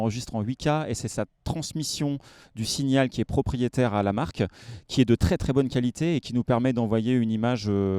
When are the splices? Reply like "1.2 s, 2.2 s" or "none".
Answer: none